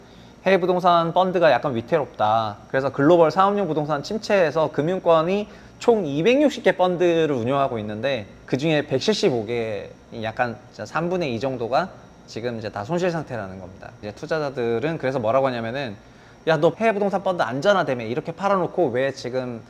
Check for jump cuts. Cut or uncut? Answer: cut